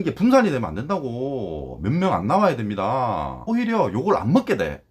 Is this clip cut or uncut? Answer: cut